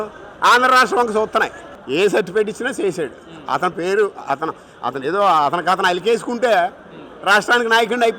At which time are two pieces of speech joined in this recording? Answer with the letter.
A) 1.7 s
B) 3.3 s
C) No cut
A